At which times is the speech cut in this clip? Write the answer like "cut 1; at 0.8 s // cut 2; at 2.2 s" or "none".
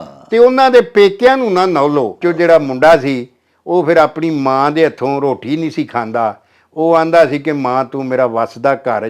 cut 1; at 2.2 s